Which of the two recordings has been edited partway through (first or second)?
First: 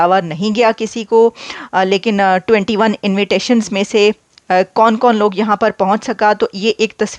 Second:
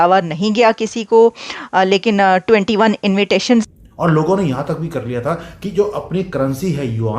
second